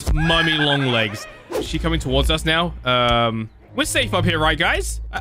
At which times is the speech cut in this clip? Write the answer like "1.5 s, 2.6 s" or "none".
1.6 s

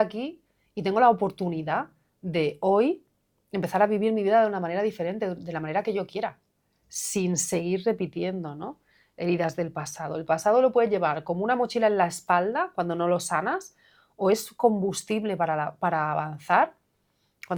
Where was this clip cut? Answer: none

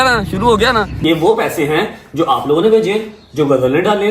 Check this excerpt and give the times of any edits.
0.9 s

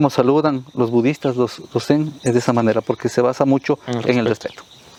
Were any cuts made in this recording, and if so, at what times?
none

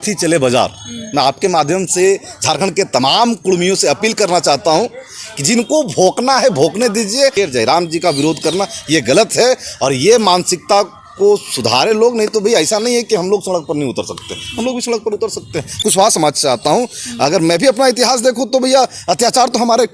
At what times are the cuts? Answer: 7.3 s, 15.8 s

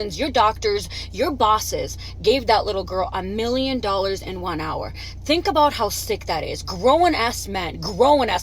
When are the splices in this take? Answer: none

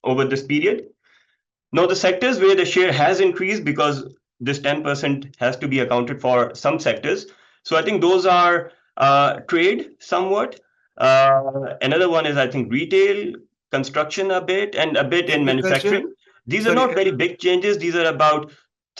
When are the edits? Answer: none

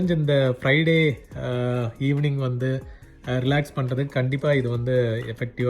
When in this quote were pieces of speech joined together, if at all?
none

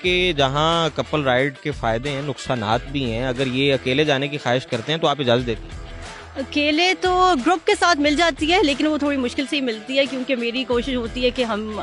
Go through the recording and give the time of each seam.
none

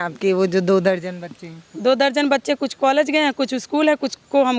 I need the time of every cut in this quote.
none

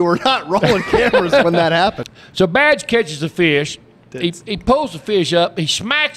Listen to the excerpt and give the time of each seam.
2.1 s

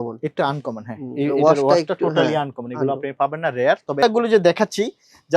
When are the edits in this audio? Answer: 4.0 s

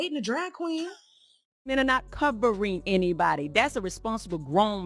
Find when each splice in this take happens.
1.2 s

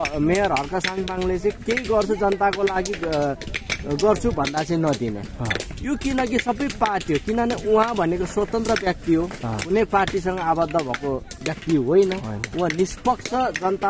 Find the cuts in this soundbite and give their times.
none

